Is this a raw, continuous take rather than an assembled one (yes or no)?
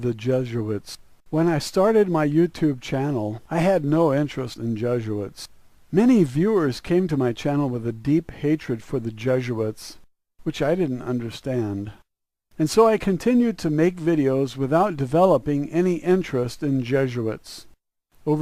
yes